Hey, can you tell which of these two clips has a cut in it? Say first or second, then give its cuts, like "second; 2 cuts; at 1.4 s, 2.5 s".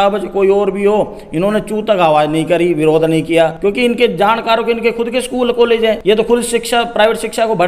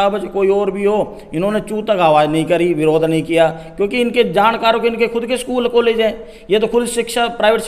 first; 2 cuts; at 3.5 s, 6.0 s